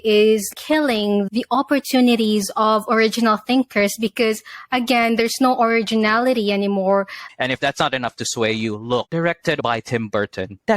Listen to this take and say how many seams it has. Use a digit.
2